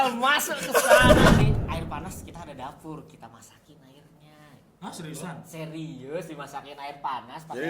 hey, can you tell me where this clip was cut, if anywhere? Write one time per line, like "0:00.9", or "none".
0:01.4

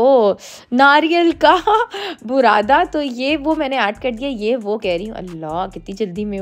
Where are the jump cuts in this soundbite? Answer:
none

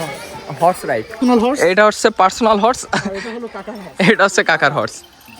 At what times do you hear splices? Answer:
0:01.1

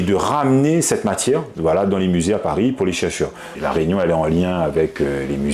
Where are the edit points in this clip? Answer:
0:03.5

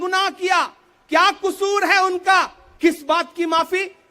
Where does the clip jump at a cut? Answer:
0:02.6

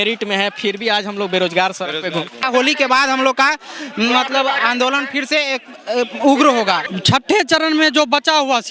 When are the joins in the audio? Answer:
0:02.4
0:06.9

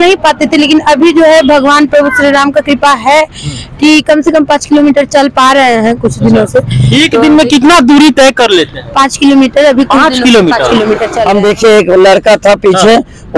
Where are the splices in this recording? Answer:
0:11.1

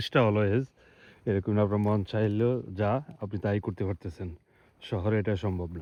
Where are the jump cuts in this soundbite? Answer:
none

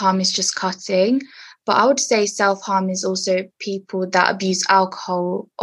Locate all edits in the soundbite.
none

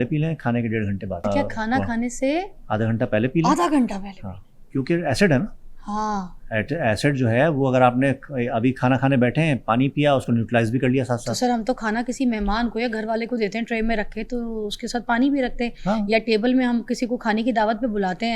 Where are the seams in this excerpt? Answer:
0:01.2

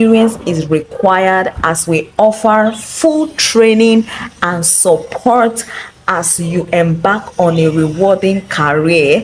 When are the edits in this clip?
none

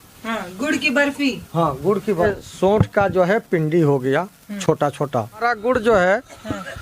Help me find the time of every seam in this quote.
0:02.2
0:05.4

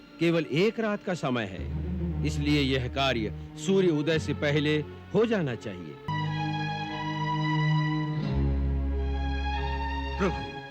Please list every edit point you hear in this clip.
0:06.1

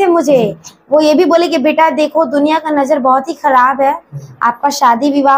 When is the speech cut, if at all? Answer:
none

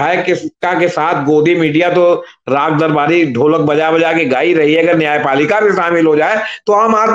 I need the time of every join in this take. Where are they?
none

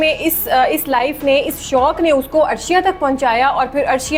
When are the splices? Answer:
none

